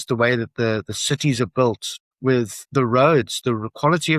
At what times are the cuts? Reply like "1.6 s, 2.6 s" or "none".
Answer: 2.5 s